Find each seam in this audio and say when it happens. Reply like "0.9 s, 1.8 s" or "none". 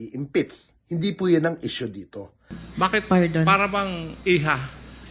2.6 s